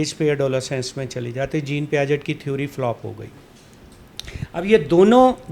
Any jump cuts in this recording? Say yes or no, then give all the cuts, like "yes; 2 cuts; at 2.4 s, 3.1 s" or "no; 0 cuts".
no; 0 cuts